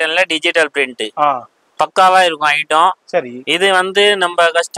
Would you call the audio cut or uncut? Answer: uncut